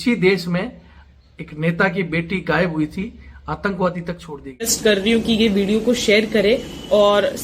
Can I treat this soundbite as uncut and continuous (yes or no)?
no